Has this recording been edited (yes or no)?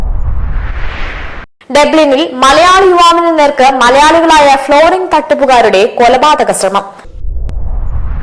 no